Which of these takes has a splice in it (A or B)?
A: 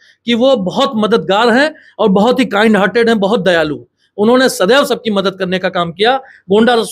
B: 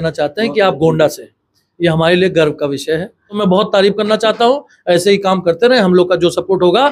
B